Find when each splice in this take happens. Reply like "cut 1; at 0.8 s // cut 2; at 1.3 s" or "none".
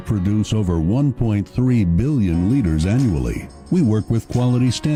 none